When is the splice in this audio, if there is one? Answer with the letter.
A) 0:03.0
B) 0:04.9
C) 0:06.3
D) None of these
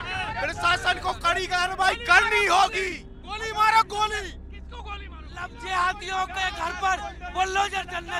D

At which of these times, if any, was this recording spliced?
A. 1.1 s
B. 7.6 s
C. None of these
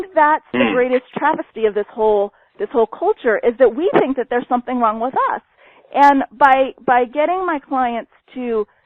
A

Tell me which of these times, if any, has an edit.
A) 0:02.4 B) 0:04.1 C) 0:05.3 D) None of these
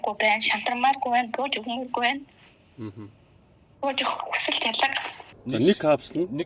C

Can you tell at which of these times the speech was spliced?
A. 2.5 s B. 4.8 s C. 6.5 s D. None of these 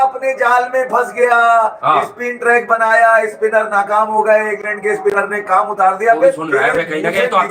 D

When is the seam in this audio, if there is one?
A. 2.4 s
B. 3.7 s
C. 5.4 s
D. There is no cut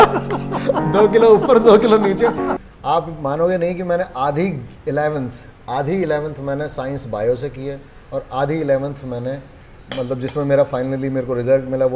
A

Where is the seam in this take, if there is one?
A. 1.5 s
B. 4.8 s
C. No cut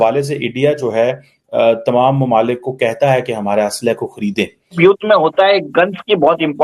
B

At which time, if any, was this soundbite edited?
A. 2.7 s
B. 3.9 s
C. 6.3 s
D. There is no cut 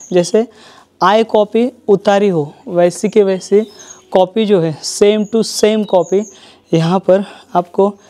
D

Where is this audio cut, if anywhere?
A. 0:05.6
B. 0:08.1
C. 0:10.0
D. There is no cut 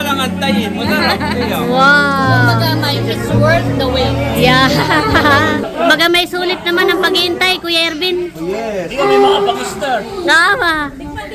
A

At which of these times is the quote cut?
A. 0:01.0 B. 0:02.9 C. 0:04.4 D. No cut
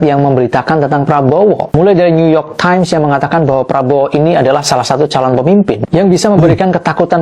D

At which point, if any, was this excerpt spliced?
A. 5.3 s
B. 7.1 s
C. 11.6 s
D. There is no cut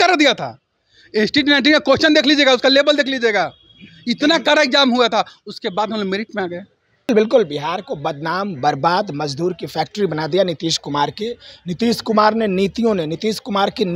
B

